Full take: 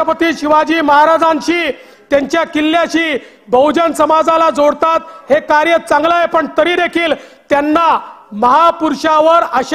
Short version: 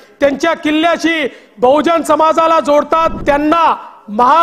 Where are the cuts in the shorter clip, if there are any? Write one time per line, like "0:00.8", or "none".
0:03.1